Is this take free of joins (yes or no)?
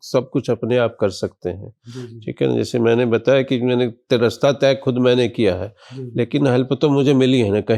yes